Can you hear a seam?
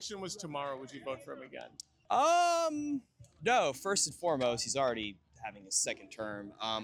no; 0 cuts

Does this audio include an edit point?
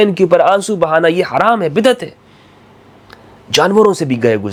no; 0 cuts

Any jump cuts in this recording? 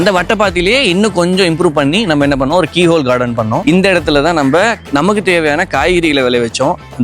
yes; 1 cut; at 3.6 s

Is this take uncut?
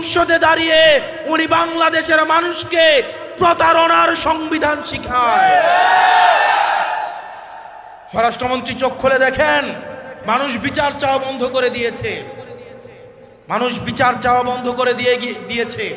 yes; 0 cuts

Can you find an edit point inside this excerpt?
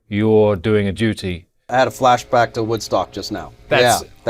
yes; 1 cut; at 1.7 s

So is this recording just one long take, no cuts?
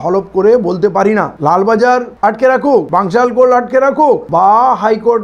no; 3 cuts; at 1.3 s, 2.9 s, 4.2 s

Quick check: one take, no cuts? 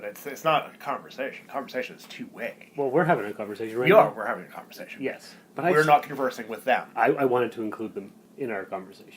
no; 1 cut; at 8.2 s

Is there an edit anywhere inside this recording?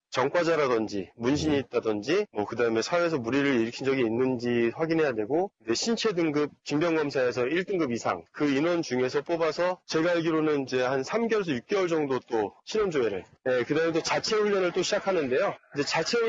yes; 1 cut; at 8.0 s

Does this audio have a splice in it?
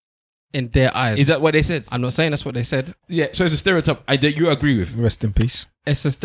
yes; 1 cut; at 3.0 s

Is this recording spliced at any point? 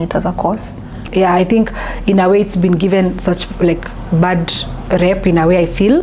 yes; 1 cut; at 1.1 s

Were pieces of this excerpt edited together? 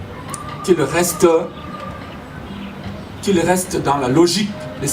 no; 0 cuts

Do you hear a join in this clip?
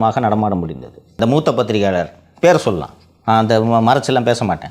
yes; 1 cut; at 1.2 s

